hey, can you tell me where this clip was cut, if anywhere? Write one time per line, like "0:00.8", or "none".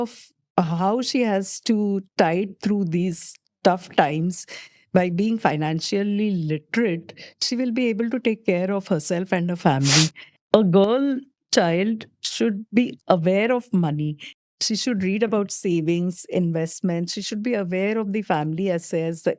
0:10.3